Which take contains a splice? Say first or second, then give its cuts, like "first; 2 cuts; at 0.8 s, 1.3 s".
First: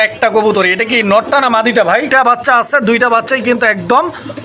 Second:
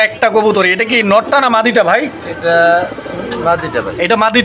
first; 1 cut; at 2.1 s